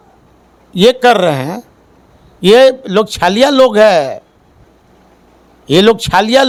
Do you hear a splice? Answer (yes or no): no